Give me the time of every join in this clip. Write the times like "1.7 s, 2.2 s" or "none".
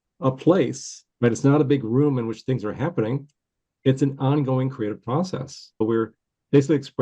5.8 s